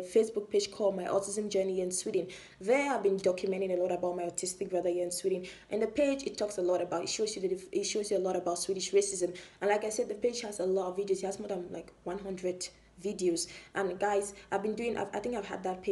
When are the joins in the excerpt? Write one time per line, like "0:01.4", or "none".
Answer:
none